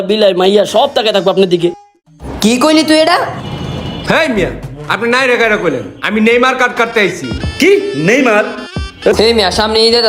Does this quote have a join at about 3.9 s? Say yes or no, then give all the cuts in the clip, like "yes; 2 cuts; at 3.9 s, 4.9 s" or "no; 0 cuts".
yes; 2 cuts; at 3.9 s, 9.1 s